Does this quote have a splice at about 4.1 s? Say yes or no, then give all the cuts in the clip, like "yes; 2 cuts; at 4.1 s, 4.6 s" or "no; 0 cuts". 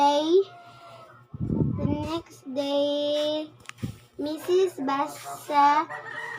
no; 0 cuts